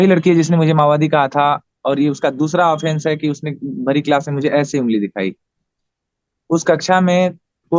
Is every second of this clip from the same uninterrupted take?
yes; 0 cuts

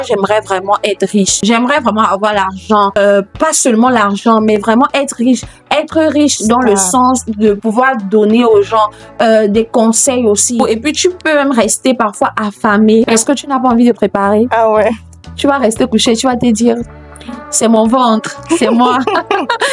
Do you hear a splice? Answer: yes; 4 cuts; at 1.3 s, 3.0 s, 10.6 s, 13.1 s

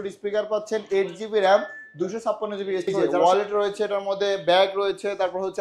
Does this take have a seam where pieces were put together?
yes; 1 cut; at 3.1 s

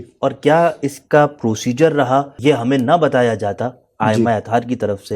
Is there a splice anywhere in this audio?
yes; 1 cut; at 2.2 s

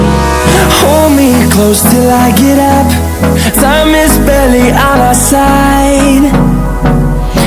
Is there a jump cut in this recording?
no; 0 cuts

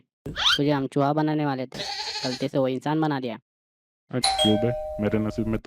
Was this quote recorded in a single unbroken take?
no; 1 cut; at 4.1 s

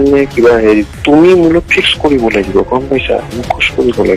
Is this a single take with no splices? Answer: no; 1 cut; at 0.9 s

